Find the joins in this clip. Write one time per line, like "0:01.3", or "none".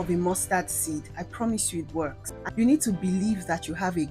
0:02.4